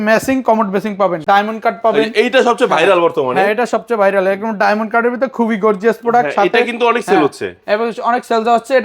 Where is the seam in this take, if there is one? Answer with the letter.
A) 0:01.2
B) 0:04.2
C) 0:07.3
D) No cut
A